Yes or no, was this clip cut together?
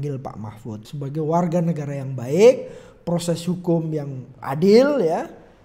yes